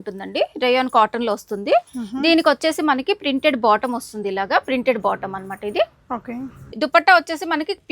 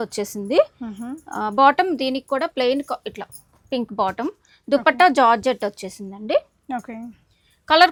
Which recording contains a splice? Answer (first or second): first